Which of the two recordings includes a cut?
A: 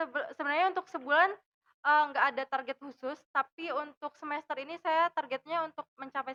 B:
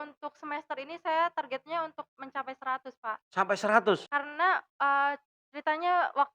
B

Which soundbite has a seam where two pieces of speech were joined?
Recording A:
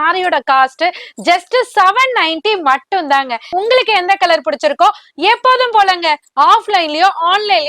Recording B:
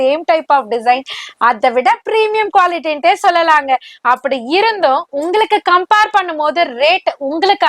A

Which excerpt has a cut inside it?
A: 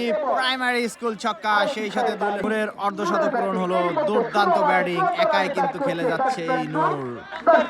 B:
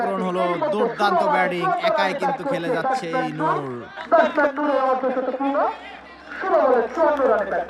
A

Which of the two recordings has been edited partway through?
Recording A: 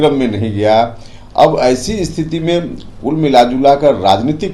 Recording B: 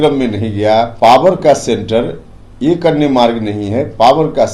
B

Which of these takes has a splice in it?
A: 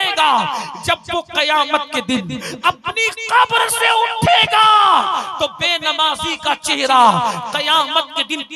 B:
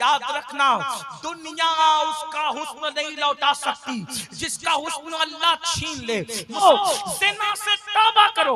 B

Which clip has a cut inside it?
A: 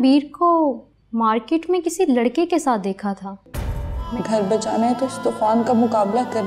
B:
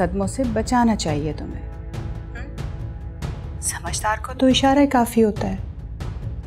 A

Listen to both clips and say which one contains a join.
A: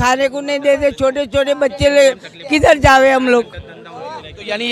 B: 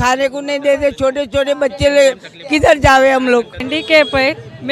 B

